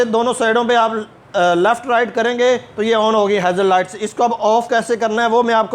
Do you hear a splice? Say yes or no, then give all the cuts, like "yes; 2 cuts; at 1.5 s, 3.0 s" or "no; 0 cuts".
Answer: no; 0 cuts